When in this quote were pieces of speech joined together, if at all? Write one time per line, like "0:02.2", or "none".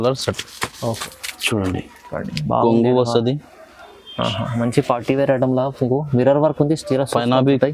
0:00.9